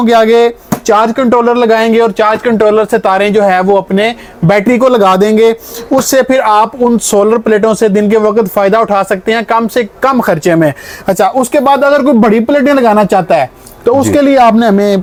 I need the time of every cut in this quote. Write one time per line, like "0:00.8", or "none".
none